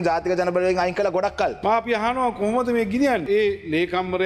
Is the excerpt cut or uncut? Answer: cut